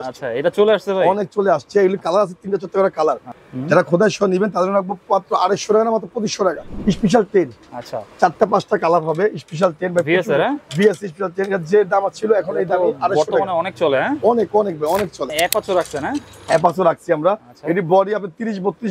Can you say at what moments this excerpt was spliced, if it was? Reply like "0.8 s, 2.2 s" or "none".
3.3 s, 6.7 s, 15.3 s